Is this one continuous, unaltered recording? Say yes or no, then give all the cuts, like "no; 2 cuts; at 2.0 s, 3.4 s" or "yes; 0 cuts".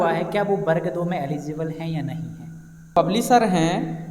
no; 1 cut; at 3.0 s